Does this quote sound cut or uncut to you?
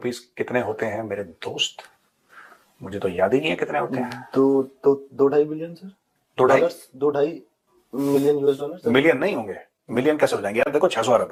uncut